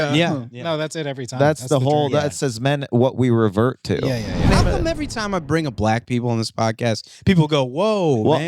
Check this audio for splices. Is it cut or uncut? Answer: cut